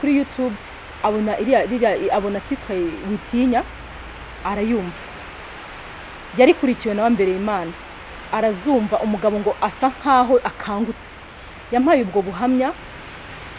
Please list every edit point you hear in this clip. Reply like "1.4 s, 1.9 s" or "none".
none